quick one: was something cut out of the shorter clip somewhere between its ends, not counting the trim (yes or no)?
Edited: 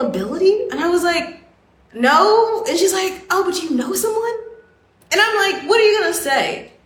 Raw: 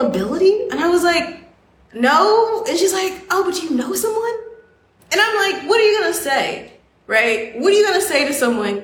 no